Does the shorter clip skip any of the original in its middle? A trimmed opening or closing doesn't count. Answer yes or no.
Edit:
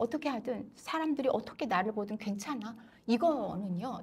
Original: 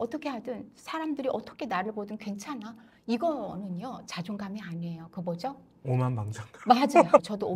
no